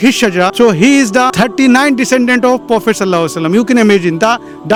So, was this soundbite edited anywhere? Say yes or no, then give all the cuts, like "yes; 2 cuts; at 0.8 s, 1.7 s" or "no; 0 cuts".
no; 0 cuts